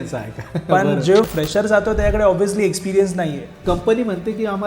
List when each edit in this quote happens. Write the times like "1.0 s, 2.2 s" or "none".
1.3 s, 3.5 s